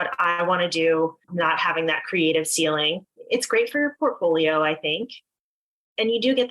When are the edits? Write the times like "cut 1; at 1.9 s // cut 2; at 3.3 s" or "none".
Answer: cut 1; at 1.2 s // cut 2; at 3.1 s